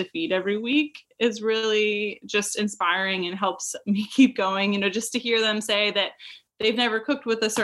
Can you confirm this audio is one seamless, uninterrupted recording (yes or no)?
yes